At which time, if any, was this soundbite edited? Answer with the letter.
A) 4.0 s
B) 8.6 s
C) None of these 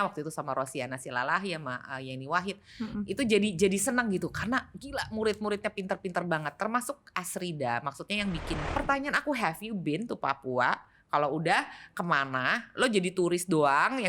B